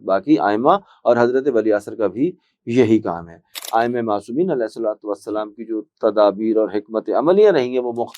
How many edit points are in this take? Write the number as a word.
one